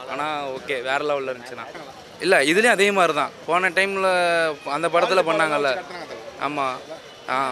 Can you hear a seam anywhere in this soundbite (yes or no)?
no